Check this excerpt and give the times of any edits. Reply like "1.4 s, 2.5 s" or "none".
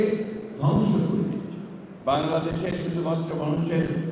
1.9 s

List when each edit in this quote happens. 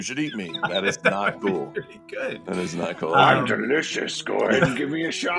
none

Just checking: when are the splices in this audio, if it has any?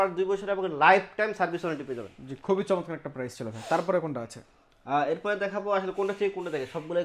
none

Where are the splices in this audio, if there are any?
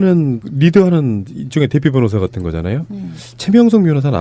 none

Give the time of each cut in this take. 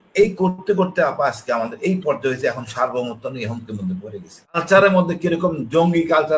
4.6 s

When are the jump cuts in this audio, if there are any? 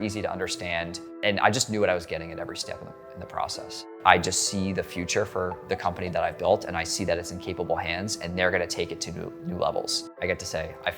1.0 s, 3.9 s, 10.0 s

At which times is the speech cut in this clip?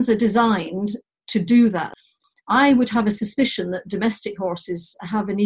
1.1 s, 1.9 s

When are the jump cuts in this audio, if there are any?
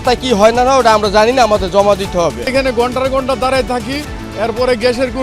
2.5 s

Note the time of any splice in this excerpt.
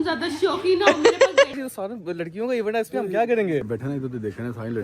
1.5 s, 3.7 s

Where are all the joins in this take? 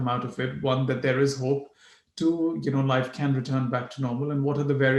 none

